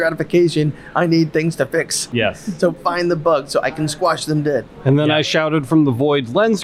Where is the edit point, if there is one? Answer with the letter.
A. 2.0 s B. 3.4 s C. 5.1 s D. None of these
A